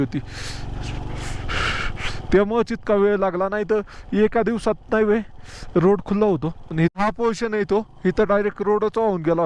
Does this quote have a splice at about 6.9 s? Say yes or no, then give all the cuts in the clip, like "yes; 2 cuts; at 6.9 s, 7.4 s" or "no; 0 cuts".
yes; 1 cut; at 6.9 s